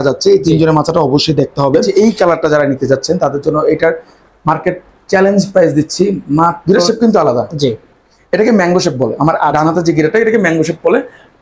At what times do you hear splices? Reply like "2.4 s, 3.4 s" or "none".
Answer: 1.9 s, 6.6 s